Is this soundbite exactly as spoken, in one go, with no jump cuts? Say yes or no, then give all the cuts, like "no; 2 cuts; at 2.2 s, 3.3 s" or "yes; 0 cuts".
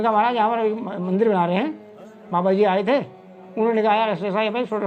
yes; 0 cuts